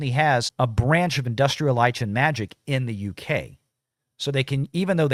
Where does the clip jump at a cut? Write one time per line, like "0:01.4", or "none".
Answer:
none